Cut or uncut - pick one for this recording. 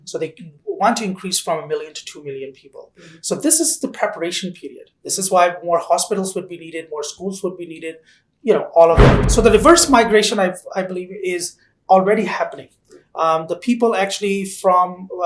cut